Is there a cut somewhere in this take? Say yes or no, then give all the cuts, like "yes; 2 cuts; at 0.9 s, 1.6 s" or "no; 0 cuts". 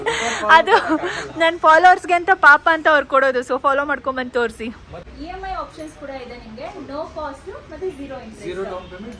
yes; 1 cut; at 4.9 s